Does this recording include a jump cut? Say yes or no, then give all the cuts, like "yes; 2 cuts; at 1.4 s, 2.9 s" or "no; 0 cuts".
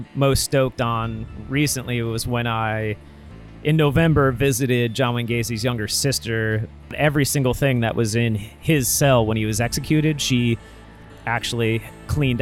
yes; 1 cut; at 7.0 s